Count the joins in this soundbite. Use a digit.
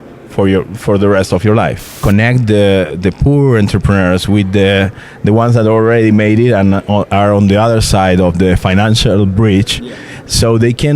1